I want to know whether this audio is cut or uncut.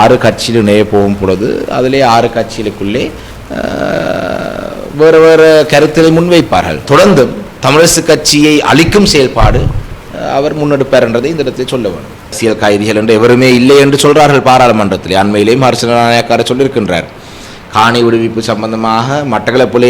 cut